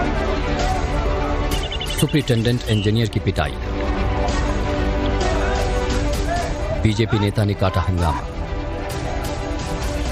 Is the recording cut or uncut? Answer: uncut